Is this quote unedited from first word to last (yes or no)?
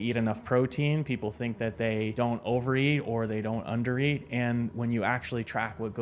no